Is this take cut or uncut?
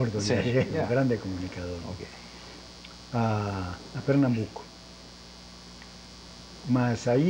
uncut